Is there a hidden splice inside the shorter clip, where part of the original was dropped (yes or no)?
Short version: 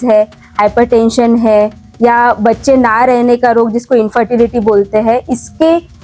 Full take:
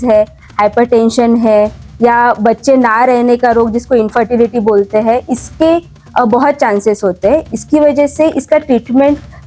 no